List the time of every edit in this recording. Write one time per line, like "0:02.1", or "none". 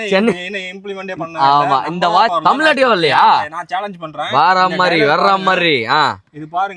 none